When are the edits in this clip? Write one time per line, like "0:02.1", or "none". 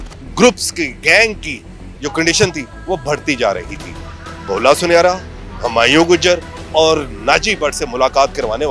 0:03.9